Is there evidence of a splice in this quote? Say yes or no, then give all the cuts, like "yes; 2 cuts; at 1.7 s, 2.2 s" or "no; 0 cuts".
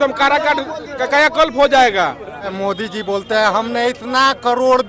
yes; 1 cut; at 2.5 s